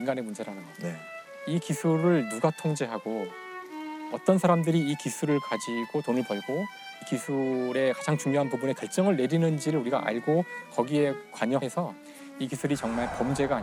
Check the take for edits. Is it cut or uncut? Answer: uncut